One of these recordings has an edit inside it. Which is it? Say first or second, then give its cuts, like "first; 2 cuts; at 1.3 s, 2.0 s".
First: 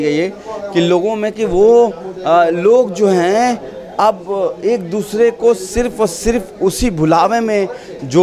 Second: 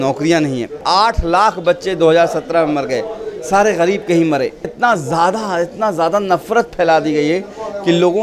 second; 2 cuts; at 0.8 s, 4.7 s